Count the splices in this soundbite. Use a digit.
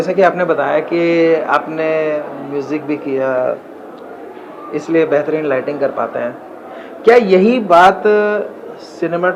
0